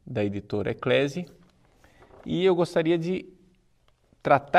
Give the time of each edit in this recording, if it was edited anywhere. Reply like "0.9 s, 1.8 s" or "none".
2.7 s